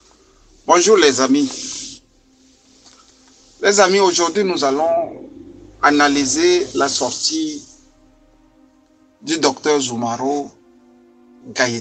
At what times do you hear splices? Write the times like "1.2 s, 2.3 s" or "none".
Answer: none